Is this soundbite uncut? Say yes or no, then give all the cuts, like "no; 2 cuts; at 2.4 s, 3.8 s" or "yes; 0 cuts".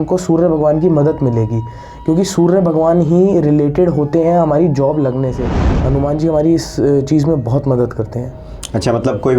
no; 1 cut; at 5.6 s